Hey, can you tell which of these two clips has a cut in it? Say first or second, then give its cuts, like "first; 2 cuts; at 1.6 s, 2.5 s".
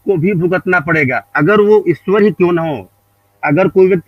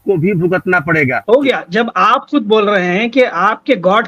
second; 1 cut; at 1.2 s